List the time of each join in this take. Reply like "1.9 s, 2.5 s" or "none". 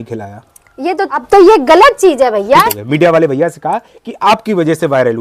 1.2 s, 2.7 s